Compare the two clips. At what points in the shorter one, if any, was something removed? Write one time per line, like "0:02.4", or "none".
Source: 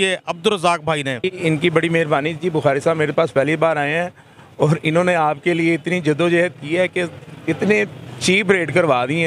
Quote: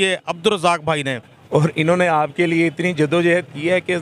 0:01.2